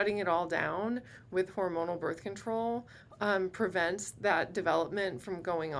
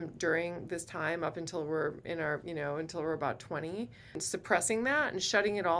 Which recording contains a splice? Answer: second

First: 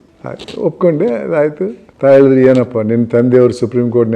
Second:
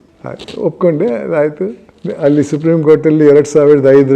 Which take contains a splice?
first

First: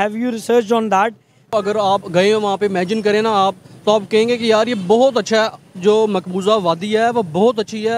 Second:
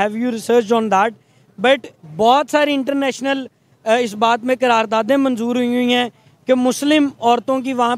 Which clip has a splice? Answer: first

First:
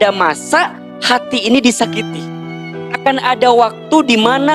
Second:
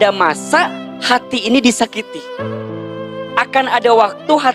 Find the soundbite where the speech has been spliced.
first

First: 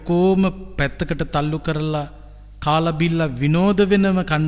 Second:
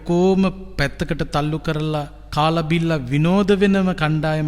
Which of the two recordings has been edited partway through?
second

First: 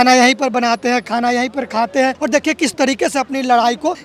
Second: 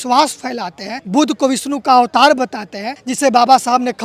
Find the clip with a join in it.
first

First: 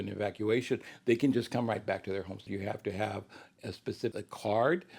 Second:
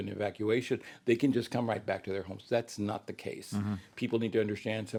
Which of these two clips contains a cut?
first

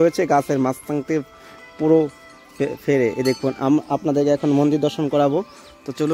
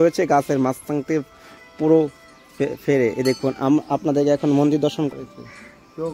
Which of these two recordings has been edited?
second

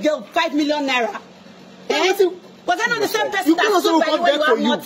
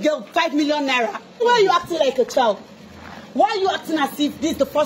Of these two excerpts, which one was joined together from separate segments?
second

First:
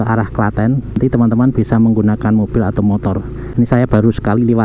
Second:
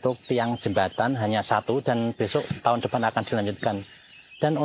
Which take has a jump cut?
first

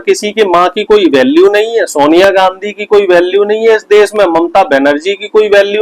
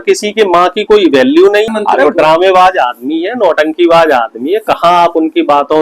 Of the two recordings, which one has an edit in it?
second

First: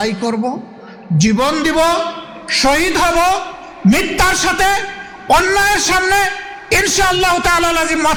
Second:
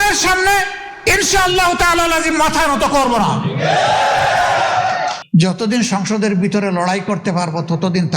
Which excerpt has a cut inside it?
second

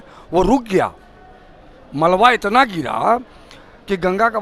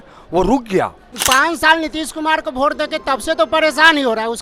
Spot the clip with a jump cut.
second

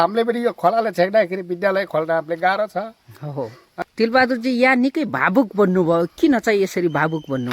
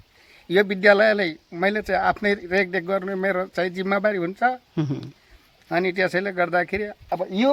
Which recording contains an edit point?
first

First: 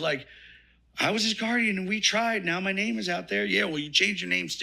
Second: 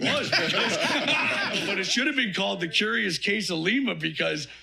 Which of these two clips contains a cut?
second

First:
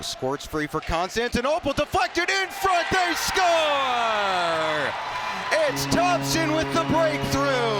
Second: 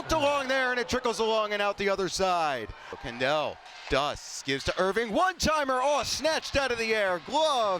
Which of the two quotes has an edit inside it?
second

